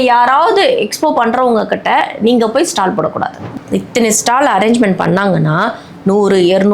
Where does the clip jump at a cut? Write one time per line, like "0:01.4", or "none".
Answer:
0:03.4